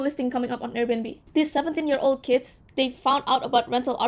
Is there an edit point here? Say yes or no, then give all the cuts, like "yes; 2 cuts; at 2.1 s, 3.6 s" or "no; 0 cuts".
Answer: yes; 1 cut; at 1.2 s